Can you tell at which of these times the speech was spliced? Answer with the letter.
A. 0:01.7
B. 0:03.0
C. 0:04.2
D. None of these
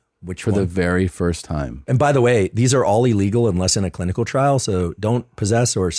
A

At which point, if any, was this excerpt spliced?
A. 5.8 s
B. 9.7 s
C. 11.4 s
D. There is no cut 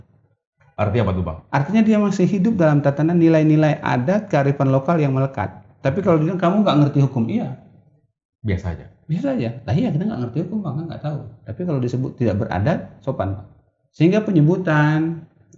D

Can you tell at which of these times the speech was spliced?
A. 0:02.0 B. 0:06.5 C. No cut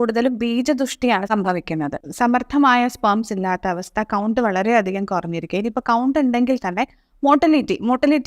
A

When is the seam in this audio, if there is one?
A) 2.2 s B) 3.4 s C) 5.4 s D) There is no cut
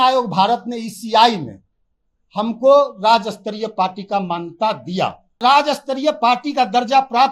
C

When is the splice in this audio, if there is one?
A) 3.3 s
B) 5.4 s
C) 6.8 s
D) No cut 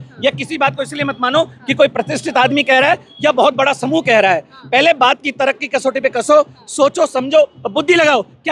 D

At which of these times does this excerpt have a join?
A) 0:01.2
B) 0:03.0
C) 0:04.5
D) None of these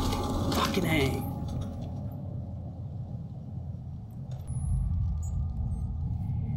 C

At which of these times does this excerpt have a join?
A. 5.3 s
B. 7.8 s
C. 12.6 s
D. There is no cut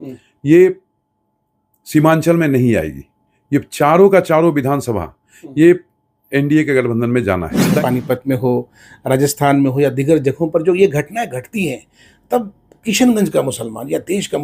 B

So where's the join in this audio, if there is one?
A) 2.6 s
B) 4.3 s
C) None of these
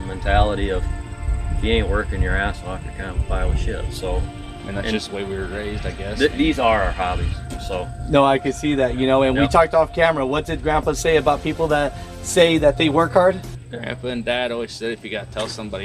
B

